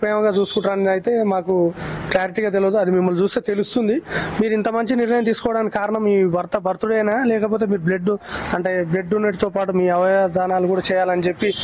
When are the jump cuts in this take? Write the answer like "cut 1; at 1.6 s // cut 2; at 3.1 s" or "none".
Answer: none

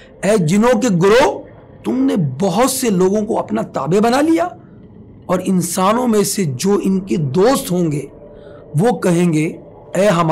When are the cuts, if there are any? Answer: none

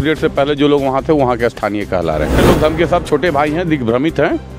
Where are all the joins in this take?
cut 1; at 2.4 s

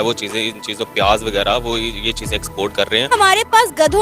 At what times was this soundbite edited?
cut 1; at 3.1 s

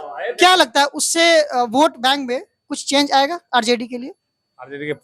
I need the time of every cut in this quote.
none

